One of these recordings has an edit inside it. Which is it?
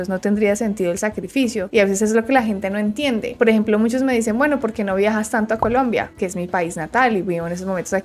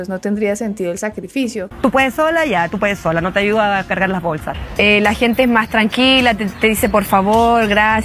second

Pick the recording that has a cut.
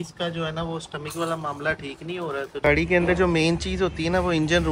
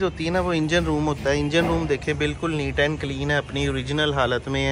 first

